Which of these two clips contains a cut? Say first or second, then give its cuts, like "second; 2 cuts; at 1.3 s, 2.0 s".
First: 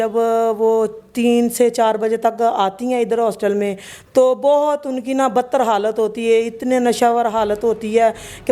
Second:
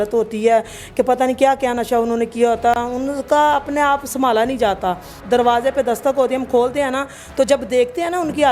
second; 1 cut; at 5.2 s